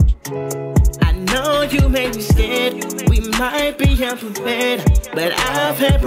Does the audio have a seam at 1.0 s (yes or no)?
yes